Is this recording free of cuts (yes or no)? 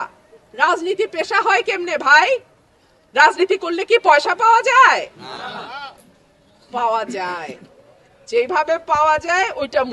yes